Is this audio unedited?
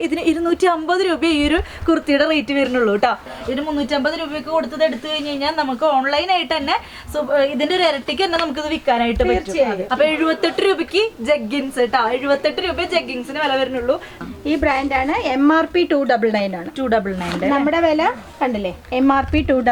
no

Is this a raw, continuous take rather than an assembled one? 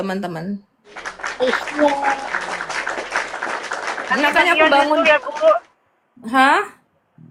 yes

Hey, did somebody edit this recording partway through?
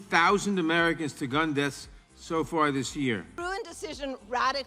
yes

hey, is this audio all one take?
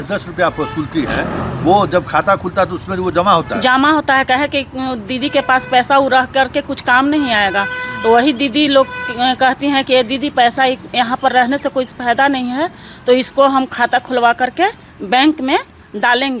yes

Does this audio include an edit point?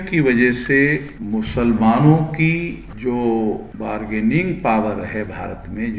yes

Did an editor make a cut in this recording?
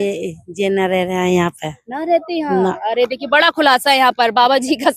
no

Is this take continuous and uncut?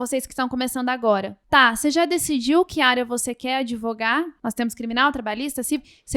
no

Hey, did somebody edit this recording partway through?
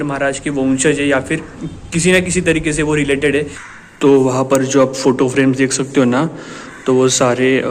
yes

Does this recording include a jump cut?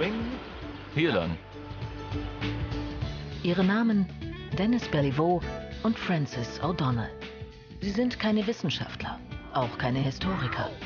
yes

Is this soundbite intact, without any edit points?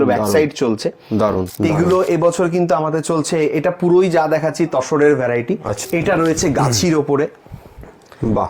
no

